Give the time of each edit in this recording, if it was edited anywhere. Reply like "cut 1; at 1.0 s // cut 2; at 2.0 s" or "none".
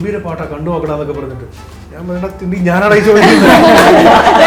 none